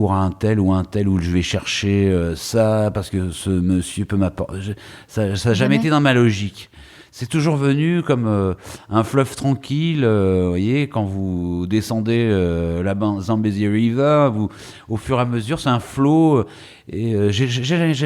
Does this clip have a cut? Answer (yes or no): no